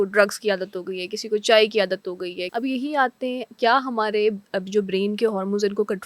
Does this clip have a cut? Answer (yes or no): yes